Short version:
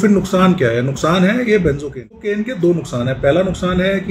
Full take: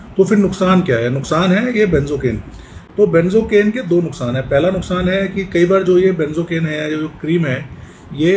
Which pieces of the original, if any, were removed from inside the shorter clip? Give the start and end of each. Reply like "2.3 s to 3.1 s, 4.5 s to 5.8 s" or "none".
2.6 s to 3.6 s